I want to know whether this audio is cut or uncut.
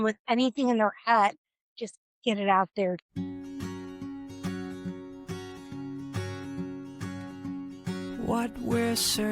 cut